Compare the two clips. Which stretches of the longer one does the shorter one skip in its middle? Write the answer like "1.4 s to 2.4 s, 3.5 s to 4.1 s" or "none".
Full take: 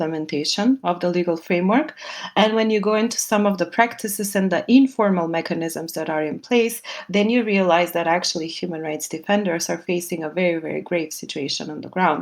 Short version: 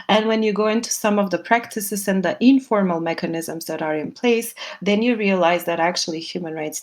none